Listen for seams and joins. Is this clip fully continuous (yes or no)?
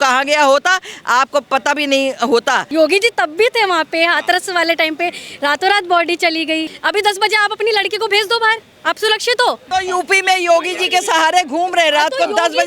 no